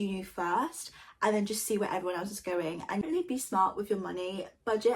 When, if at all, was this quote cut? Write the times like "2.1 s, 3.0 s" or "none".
3.0 s